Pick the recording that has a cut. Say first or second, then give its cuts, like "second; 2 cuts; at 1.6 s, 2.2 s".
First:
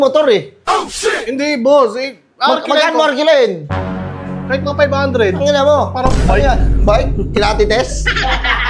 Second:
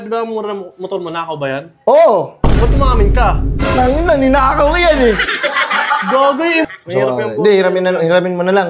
second; 1 cut; at 6.6 s